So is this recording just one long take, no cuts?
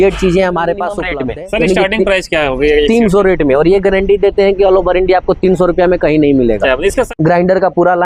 no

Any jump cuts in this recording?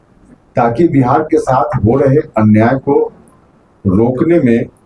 no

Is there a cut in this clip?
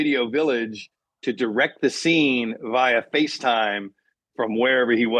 no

